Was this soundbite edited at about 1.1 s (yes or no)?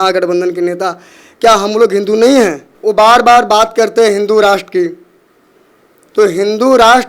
no